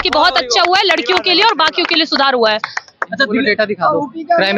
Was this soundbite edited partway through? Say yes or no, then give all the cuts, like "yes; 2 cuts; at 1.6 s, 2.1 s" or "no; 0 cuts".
no; 0 cuts